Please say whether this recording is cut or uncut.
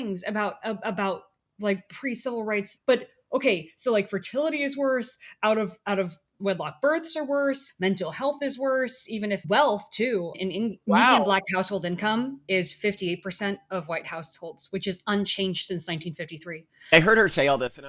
cut